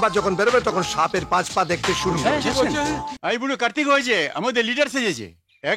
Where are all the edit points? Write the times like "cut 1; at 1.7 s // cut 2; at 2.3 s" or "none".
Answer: cut 1; at 3.1 s